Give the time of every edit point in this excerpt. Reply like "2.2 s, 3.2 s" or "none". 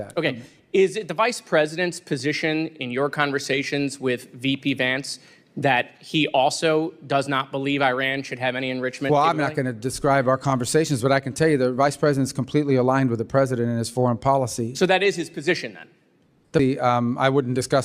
16.6 s